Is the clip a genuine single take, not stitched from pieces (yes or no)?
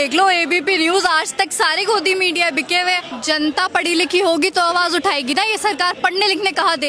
no